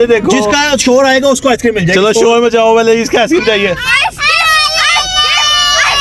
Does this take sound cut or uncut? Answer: uncut